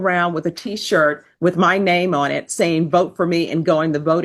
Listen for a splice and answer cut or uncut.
uncut